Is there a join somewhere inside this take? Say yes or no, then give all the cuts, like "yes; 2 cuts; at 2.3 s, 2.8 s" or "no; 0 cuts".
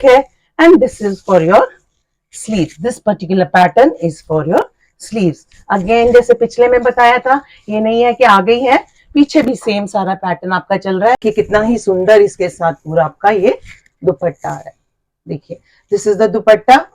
yes; 1 cut; at 11.2 s